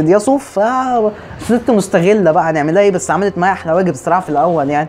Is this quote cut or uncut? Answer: uncut